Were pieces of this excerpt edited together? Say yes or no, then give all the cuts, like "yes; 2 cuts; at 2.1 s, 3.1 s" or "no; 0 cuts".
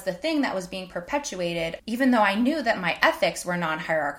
yes; 1 cut; at 1.8 s